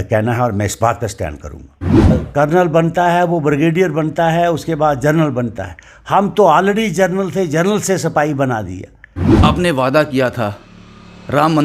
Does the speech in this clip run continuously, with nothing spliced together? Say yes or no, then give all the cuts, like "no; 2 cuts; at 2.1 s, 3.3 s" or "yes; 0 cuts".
no; 2 cuts; at 2.1 s, 9.4 s